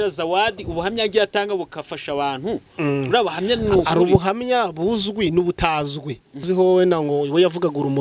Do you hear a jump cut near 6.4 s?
yes; 1 cut; at 6.4 s

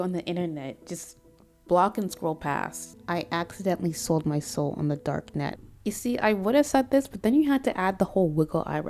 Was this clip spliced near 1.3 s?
no; 2 cuts; at 2.9 s, 5.6 s

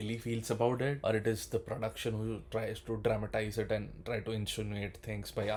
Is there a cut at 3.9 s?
no; 0 cuts

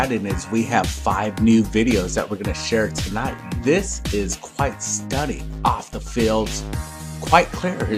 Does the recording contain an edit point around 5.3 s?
no; 1 cut; at 2.1 s

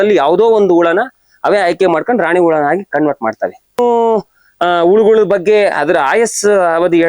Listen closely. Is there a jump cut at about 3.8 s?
yes; 1 cut; at 3.8 s

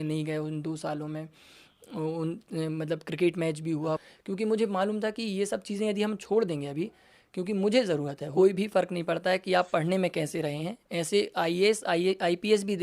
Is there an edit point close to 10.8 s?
no; 2 cuts; at 4.0 s, 8.2 s

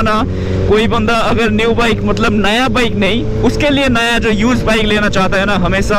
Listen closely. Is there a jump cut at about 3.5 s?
no; 0 cuts

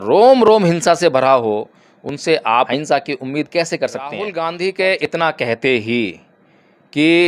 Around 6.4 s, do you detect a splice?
no; 2 cuts; at 2.7 s, 4.2 s

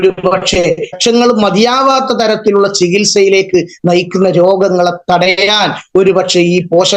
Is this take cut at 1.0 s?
yes; 1 cut; at 1.0 s

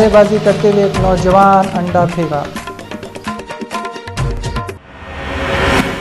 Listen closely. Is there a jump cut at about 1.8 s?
no; 1 cut; at 4.5 s

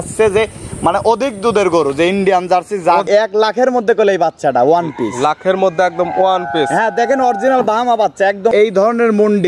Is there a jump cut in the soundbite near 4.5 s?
no; 2 cuts; at 3.1 s, 8.5 s

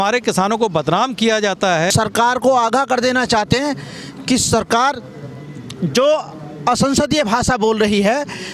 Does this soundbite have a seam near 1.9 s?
yes; 1 cut; at 1.9 s

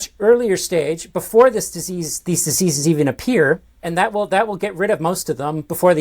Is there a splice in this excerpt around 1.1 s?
no; 1 cut; at 3.8 s

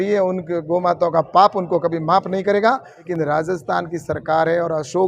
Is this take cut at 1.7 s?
no; 1 cut; at 3.1 s

